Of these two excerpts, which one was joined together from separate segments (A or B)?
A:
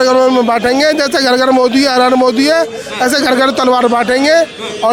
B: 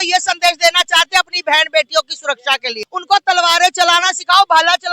B